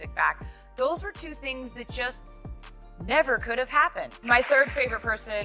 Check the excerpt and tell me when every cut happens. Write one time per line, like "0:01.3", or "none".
0:03.9